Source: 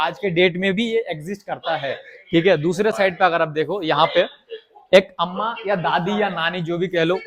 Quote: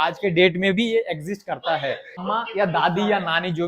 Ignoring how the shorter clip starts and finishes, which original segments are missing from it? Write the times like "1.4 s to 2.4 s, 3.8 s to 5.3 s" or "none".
2.2 s to 5.3 s